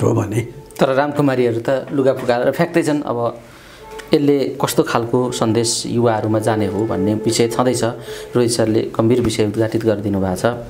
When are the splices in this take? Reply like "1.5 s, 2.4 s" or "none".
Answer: none